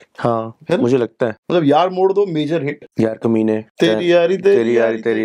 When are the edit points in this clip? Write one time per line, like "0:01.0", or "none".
0:01.4
0:02.8
0:03.7